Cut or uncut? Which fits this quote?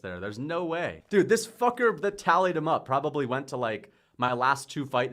cut